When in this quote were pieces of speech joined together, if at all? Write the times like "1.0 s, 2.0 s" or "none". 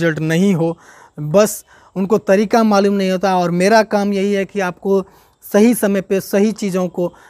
none